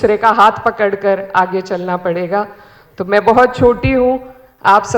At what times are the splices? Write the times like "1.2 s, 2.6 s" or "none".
none